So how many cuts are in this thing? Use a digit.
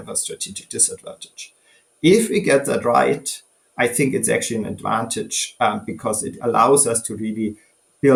0